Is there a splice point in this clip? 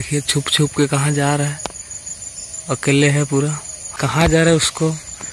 yes; 1 cut; at 4.0 s

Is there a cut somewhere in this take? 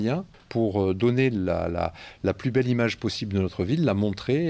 no; 0 cuts

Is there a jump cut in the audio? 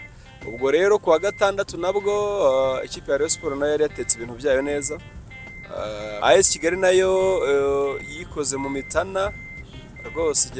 yes; 1 cut; at 6.2 s

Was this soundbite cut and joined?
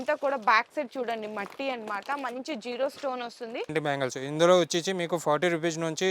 yes; 1 cut; at 3.7 s

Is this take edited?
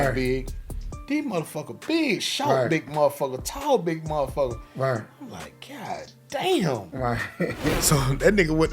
yes; 1 cut; at 7.8 s

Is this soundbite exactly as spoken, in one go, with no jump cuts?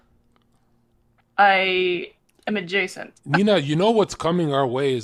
yes; 0 cuts

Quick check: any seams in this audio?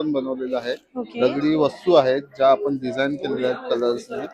no; 0 cuts

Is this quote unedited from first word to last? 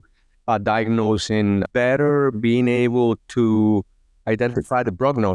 no; 1 cut; at 1.7 s

